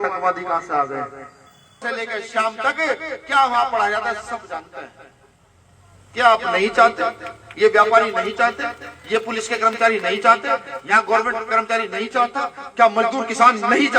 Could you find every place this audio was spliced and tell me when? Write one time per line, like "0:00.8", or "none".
0:01.8